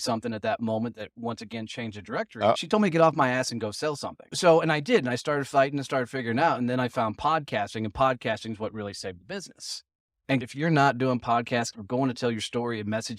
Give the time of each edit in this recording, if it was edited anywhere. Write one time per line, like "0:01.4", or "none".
0:02.6
0:04.3
0:10.3
0:11.7